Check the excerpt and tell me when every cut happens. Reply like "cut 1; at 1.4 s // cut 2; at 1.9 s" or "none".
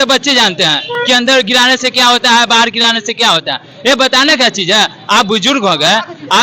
none